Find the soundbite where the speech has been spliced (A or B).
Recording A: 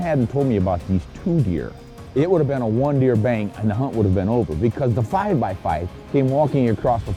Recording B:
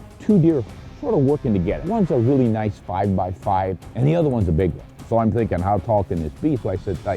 B